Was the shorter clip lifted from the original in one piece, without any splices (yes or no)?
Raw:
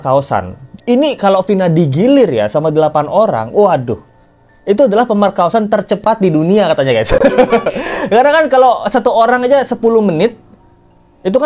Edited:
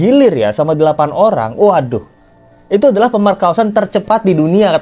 yes